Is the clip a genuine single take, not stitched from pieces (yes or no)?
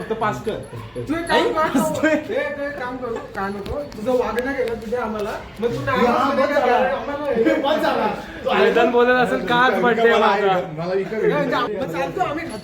no